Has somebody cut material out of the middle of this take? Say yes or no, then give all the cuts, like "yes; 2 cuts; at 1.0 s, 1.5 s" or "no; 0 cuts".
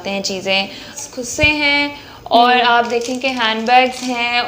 yes; 1 cut; at 0.9 s